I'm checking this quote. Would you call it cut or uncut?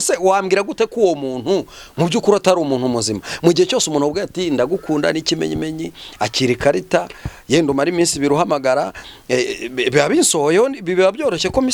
uncut